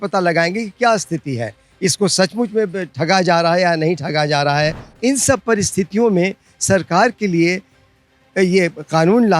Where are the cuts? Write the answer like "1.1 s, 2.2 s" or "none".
4.9 s